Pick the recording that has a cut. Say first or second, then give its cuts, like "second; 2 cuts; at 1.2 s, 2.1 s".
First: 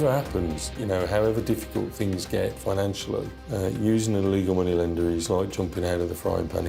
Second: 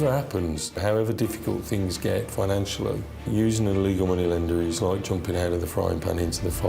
second; 2 cuts; at 0.8 s, 3.2 s